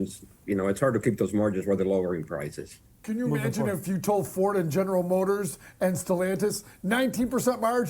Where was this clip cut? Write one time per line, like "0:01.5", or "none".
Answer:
0:03.0